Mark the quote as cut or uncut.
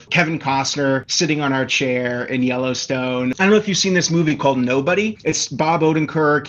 cut